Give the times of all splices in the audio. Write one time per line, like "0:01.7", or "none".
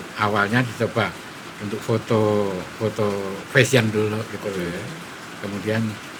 none